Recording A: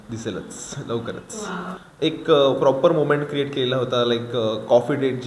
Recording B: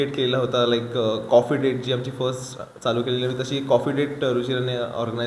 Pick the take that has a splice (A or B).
A